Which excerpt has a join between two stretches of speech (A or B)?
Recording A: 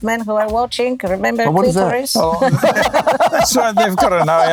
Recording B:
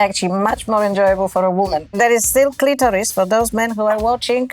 B